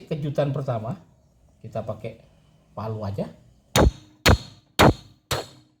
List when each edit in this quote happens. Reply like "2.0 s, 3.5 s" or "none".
none